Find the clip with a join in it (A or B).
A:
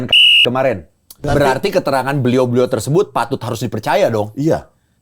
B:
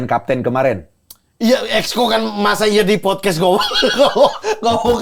A